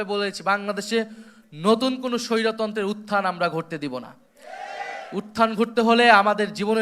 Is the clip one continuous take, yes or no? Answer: yes